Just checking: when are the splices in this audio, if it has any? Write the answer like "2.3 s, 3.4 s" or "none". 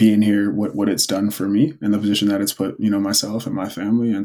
none

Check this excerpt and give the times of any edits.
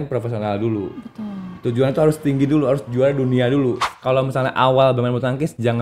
3.8 s

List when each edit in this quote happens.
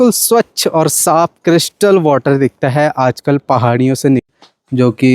4.2 s

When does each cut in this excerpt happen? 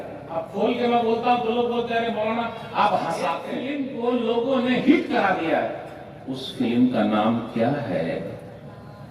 3.5 s

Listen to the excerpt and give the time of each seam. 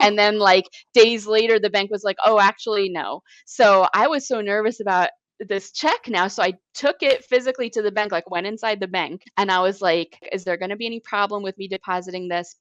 9.2 s, 10.3 s

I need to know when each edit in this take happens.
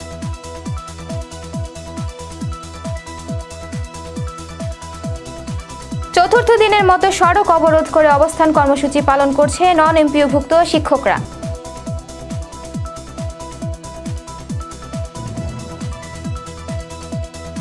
none

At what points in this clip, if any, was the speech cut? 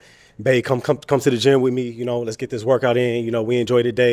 none

